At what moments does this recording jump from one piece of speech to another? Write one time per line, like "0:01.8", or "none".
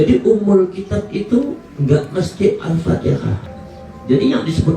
0:03.5